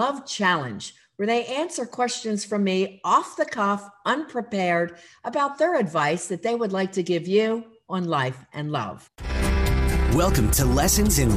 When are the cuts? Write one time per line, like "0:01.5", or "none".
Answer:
0:09.4